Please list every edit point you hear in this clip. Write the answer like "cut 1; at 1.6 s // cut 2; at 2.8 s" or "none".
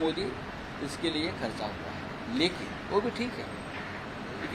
none

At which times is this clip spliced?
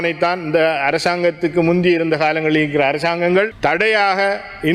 cut 1; at 3.5 s

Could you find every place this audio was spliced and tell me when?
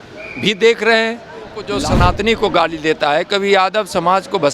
cut 1; at 1.7 s

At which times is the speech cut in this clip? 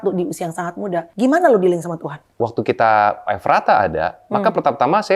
cut 1; at 1.1 s // cut 2; at 2.2 s

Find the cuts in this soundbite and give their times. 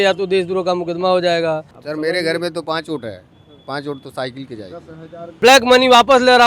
cut 1; at 1.7 s // cut 2; at 5.2 s

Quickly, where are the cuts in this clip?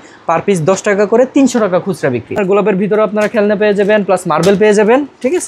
cut 1; at 2.3 s

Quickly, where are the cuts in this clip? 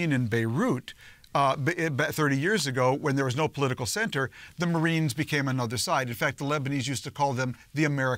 none

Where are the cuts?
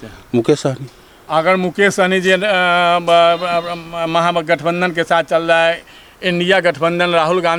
none

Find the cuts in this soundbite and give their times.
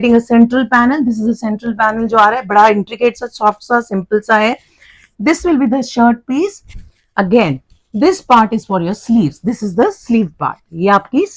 none

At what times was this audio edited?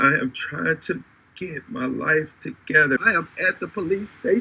cut 1; at 3.0 s

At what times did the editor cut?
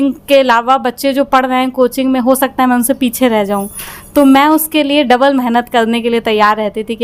none

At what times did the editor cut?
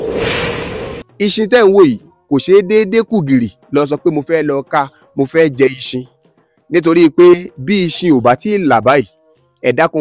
cut 1; at 1.0 s

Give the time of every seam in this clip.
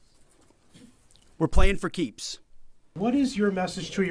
cut 1; at 2.9 s

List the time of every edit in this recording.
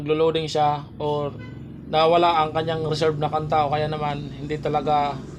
none

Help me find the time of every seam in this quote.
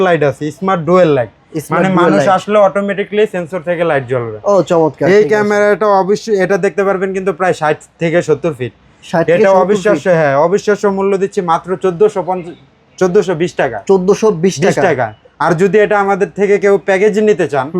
none

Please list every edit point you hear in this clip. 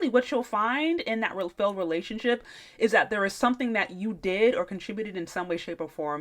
none

